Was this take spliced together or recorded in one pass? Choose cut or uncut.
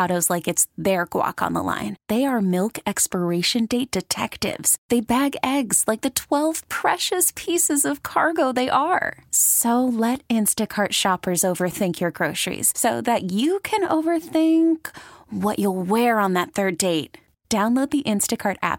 uncut